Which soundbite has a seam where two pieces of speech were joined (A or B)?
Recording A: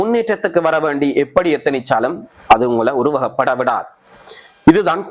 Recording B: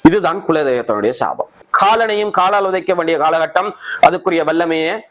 B